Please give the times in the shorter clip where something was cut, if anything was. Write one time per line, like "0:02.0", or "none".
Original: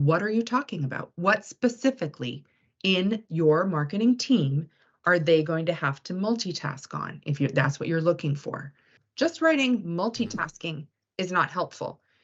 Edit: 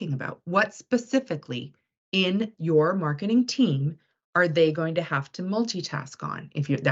none

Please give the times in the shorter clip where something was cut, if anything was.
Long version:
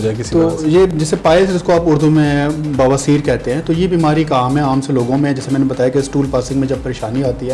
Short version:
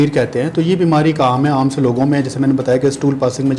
none

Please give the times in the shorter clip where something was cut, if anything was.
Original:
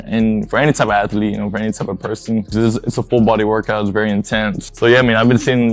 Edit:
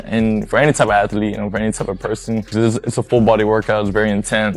none

